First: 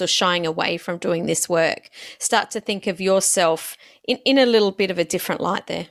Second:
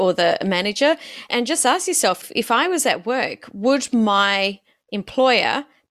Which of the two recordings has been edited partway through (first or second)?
second